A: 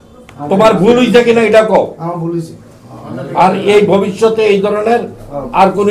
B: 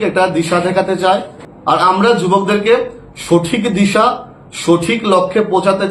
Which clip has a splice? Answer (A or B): B